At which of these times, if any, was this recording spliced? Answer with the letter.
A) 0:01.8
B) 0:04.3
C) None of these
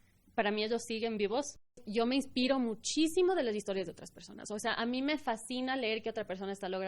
A